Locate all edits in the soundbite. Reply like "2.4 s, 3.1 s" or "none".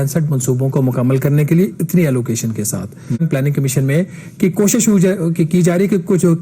3.2 s